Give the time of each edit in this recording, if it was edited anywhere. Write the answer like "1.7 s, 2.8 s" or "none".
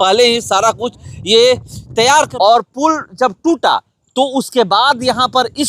2.3 s